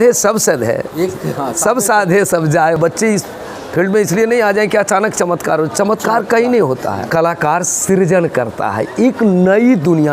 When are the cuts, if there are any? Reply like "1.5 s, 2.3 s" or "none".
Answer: 2.8 s, 7.0 s